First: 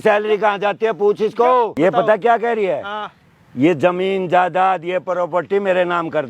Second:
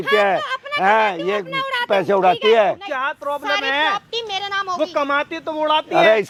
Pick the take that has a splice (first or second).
first